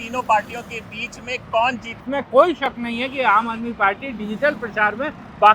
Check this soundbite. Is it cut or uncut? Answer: cut